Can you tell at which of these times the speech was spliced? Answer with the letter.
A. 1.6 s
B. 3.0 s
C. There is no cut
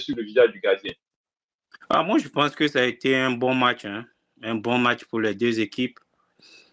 C